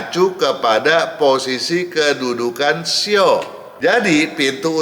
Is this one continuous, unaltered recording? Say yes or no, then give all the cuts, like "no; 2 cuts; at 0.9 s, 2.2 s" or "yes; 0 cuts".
no; 1 cut; at 3.6 s